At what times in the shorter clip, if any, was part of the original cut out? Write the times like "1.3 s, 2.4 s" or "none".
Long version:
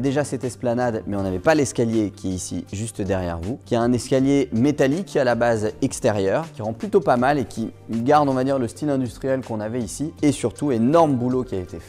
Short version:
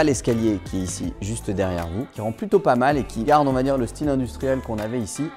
2.1 s, 3.2 s